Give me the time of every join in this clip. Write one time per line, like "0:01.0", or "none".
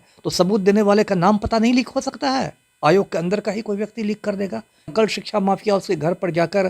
0:04.9